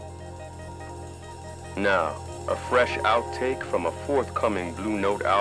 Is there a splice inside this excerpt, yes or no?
yes